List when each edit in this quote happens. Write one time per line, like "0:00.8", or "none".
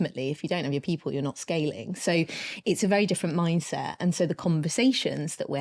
none